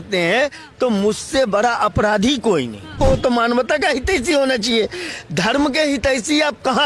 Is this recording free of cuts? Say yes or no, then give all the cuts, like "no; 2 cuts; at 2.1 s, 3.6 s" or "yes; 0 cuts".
no; 1 cut; at 2.9 s